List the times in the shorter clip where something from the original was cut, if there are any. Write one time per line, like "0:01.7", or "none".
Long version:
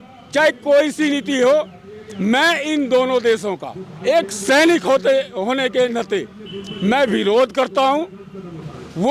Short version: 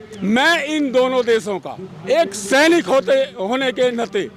none